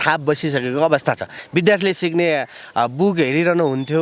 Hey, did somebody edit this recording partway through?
yes; 1 cut; at 1.4 s

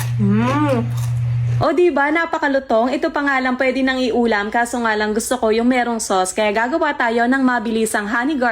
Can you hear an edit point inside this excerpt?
no; 0 cuts

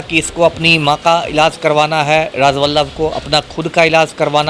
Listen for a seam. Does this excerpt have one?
no; 0 cuts

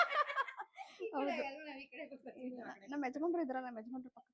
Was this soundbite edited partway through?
no; 0 cuts

